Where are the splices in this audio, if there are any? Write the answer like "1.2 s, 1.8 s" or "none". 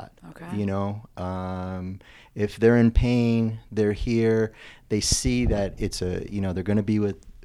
none